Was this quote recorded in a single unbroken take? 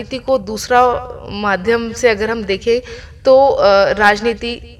yes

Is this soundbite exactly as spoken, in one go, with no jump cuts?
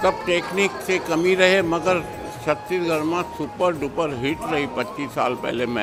yes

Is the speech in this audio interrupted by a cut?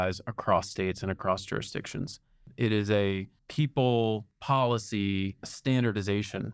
yes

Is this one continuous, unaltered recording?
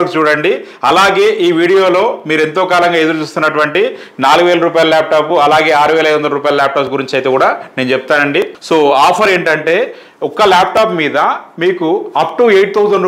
no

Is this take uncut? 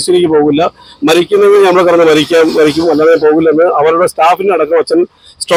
yes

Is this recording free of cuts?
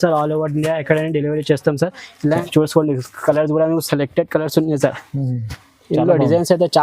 no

